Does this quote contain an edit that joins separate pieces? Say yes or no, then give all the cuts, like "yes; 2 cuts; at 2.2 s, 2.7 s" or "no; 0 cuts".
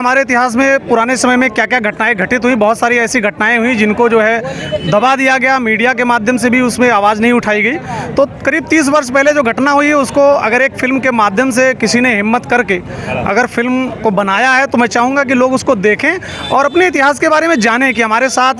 no; 0 cuts